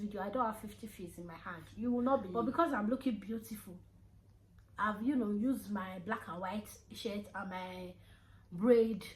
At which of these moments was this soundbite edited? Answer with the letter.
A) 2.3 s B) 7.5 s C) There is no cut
A